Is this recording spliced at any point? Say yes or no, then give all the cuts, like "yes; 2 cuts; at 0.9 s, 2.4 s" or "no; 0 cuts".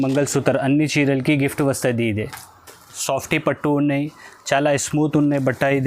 yes; 1 cut; at 3.0 s